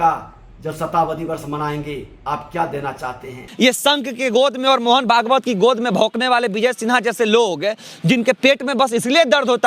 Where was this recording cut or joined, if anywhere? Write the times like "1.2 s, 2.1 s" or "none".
3.4 s